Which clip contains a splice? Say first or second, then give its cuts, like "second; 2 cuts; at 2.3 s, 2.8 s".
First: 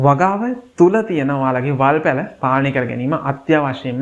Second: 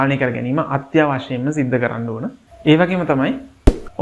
second; 1 cut; at 2.5 s